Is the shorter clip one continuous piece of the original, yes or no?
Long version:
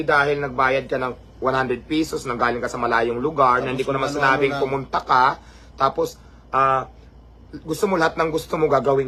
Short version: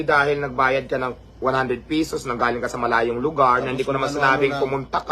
yes